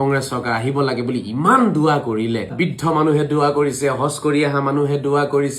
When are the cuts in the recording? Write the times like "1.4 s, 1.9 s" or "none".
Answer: 2.5 s